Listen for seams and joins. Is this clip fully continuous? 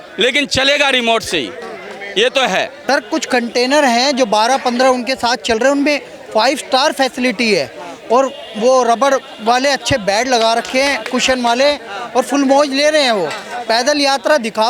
no; 1 cut; at 2.8 s

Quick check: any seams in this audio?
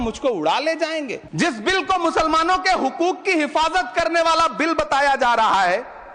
yes; 1 cut; at 1.2 s

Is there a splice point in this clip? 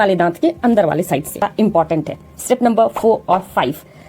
yes; 1 cut; at 1.4 s

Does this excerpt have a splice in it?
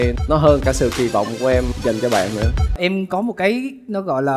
yes; 1 cut; at 2.8 s

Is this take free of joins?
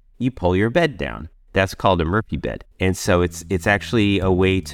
yes; 0 cuts

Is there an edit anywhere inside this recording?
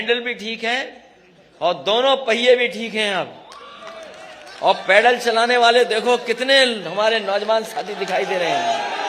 no; 0 cuts

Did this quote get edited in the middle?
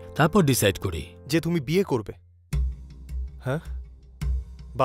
no; 0 cuts

